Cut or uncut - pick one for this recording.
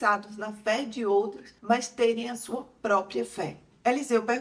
uncut